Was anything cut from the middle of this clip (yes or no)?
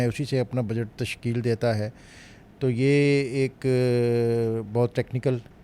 no